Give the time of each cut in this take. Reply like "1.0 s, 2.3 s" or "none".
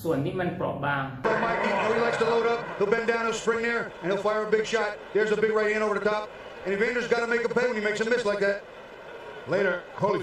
1.1 s